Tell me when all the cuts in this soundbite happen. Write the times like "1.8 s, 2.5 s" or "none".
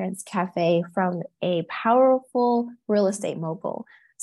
none